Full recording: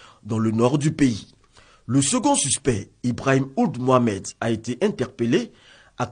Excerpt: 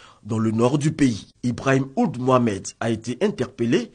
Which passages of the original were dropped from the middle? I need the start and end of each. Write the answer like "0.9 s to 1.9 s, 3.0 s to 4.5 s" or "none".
1.3 s to 2.9 s